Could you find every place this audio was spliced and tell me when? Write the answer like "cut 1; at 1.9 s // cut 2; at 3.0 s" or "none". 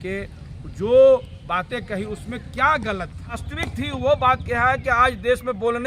cut 1; at 3.5 s